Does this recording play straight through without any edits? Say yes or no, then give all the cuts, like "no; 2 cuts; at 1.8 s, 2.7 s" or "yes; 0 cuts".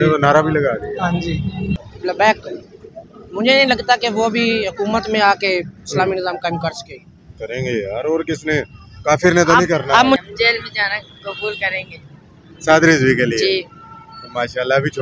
no; 2 cuts; at 1.7 s, 10.2 s